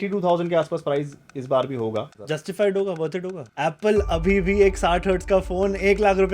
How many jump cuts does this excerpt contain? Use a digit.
2